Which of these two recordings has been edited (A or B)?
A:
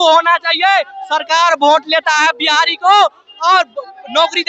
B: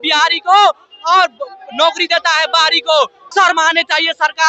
B